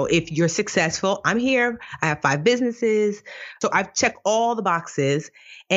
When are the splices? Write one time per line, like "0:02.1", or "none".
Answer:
0:03.6